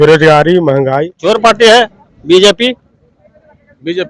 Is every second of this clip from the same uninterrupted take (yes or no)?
no